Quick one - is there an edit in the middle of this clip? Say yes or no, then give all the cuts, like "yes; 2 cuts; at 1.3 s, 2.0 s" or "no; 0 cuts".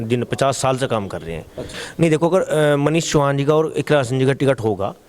yes; 1 cut; at 1.6 s